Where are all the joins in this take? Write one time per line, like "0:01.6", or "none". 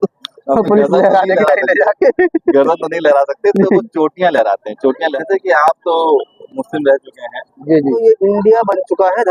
0:05.1
0:08.0

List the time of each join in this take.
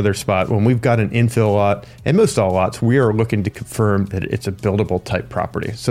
none

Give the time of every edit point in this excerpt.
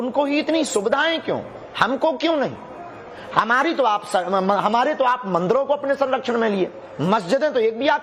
0:04.6

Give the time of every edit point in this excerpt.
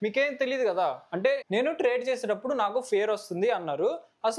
0:01.4

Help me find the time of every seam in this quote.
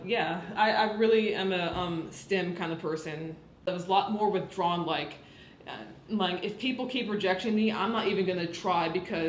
0:03.7

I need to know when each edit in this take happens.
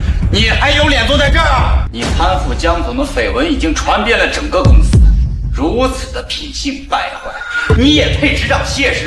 0:01.8

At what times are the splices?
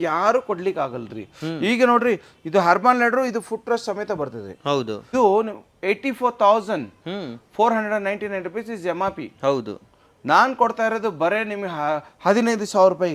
0:05.1

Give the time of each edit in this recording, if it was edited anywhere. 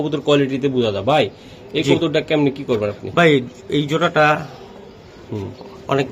none

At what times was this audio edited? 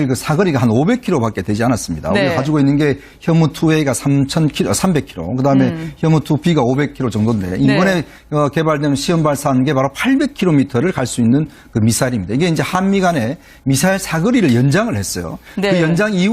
0:11.8

